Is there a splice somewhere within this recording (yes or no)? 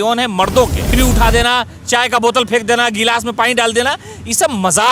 yes